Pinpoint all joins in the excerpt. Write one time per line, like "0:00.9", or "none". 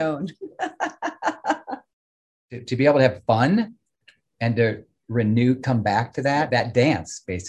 0:02.3
0:06.5